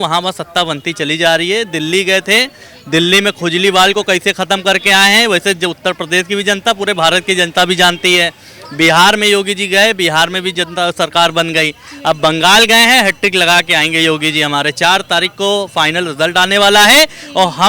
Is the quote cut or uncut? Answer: uncut